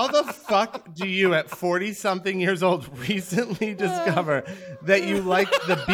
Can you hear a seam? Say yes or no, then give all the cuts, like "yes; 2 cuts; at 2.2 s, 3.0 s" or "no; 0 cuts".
no; 0 cuts